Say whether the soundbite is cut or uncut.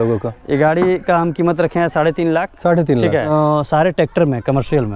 cut